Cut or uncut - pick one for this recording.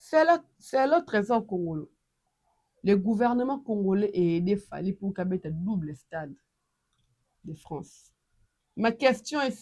uncut